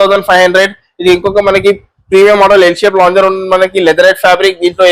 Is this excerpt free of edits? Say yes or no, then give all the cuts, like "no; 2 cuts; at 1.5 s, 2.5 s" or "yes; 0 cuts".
yes; 0 cuts